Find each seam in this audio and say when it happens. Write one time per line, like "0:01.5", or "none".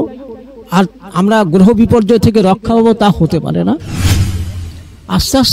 0:04.3

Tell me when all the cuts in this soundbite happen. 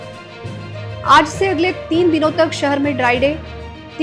0:01.0

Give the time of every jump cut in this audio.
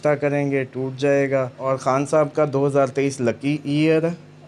0:01.5

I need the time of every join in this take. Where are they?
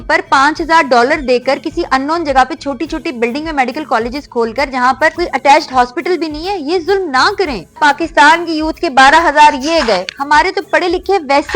0:05.1
0:07.8

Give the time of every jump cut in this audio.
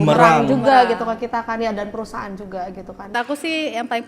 0:03.1

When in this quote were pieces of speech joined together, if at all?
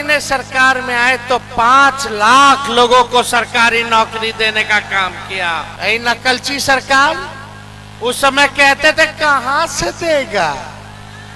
0:05.7

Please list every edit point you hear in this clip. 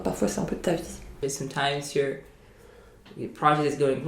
0:01.0

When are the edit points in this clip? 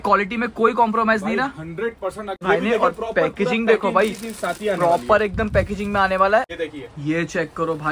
0:02.4
0:06.5

